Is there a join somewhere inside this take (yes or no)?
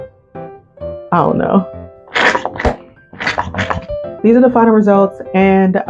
yes